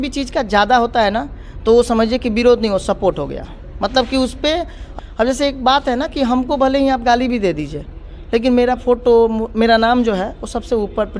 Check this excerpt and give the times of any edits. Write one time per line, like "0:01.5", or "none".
0:04.8